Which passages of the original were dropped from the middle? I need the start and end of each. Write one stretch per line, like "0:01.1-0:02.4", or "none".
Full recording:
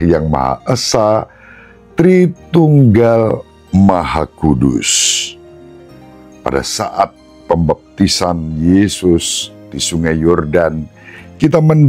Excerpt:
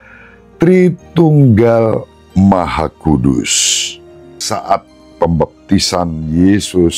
0:05.8-0:06.7